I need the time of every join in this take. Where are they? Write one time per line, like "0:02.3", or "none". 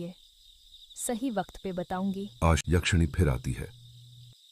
0:02.6